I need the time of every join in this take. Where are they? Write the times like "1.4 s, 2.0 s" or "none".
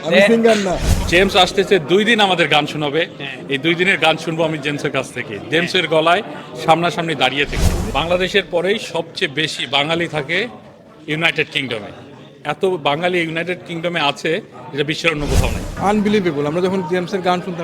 1.0 s, 7.7 s, 15.7 s